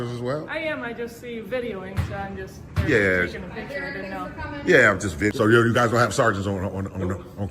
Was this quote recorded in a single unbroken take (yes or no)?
no